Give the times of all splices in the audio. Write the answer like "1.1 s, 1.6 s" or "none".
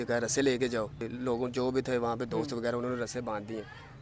1.1 s